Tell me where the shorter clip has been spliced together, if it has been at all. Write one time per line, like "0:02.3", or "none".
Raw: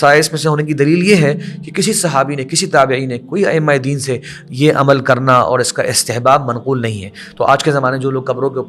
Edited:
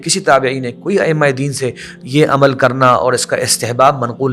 none